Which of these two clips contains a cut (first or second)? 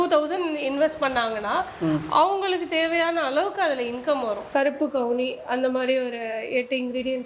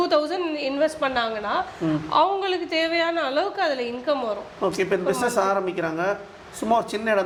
first